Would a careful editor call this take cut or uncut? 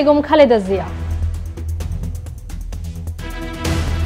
cut